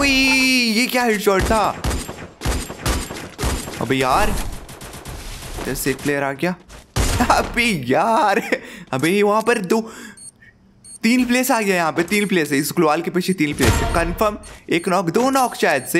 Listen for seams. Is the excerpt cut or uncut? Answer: uncut